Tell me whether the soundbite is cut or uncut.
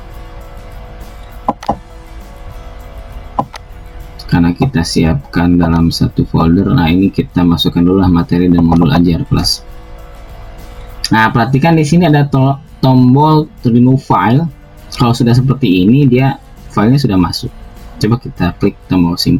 uncut